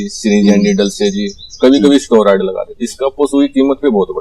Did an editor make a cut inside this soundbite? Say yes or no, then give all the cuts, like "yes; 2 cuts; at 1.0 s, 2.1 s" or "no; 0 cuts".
yes; 1 cut; at 2.6 s